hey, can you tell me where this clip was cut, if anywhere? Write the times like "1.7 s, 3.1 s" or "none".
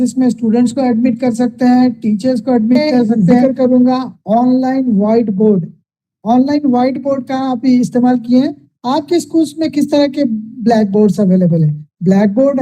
3.3 s